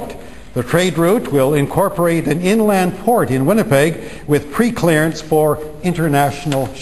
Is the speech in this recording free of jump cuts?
yes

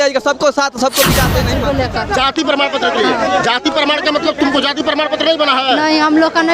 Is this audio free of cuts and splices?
no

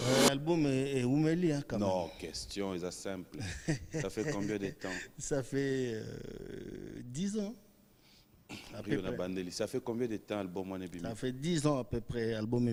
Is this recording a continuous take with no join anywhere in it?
yes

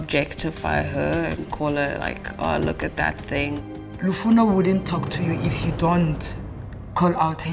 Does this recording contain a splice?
yes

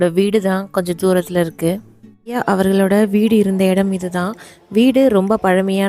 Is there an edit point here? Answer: yes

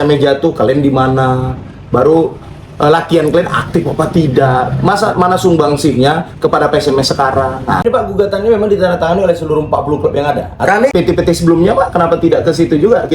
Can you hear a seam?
yes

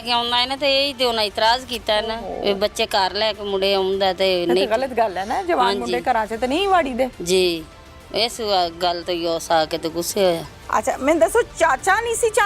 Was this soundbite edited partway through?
no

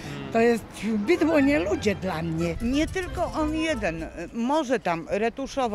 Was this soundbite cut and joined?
yes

